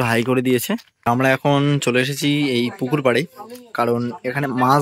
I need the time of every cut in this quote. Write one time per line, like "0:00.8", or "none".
0:01.0

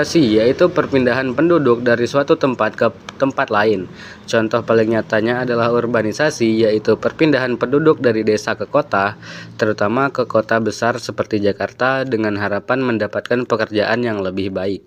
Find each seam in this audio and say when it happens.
none

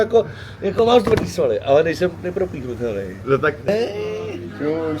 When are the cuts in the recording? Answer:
0:03.7

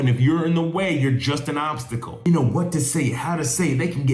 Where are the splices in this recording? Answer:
0:02.3

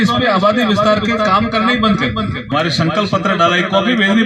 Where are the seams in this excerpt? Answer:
0:02.5

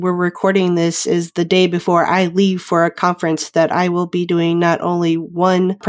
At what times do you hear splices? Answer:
none

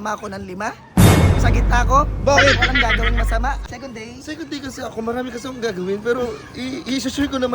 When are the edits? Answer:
0:03.6

